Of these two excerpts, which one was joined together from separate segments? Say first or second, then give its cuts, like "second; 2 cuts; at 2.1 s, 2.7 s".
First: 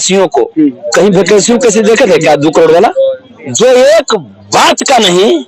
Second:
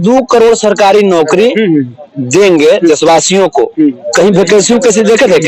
first; 1 cut; at 3.2 s